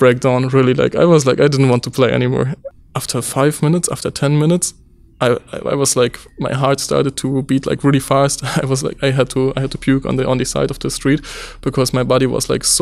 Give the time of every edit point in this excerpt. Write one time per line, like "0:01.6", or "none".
0:02.6